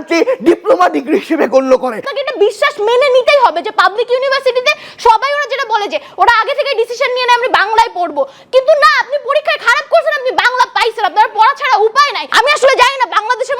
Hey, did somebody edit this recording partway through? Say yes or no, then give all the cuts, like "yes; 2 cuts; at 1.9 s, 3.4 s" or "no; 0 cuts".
yes; 2 cuts; at 2.0 s, 12.2 s